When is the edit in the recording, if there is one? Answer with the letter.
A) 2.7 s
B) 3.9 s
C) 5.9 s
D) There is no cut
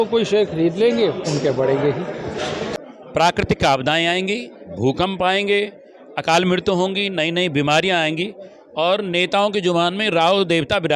A